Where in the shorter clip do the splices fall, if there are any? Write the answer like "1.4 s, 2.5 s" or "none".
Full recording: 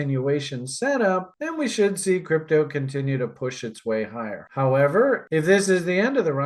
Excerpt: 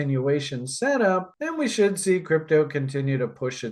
none